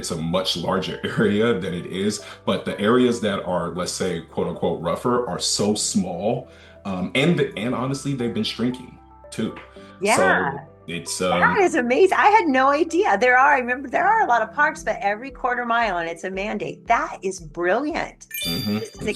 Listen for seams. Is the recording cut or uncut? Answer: uncut